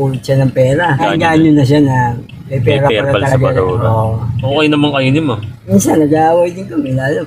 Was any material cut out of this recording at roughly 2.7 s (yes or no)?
no